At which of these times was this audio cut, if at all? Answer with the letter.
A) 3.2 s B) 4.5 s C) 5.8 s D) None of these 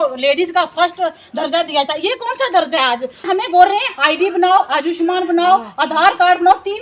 A